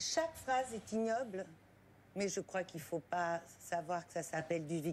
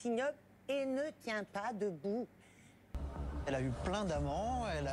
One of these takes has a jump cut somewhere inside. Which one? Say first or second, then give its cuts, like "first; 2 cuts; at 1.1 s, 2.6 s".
second; 1 cut; at 3.0 s